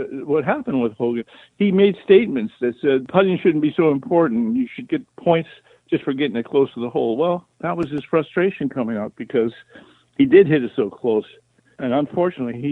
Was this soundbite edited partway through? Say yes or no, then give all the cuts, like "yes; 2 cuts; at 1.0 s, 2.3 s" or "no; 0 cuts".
yes; 3 cuts; at 1.3 s, 3.1 s, 11.7 s